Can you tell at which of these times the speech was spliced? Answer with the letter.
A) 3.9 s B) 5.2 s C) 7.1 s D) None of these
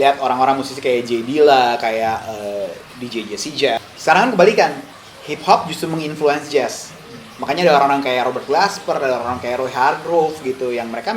A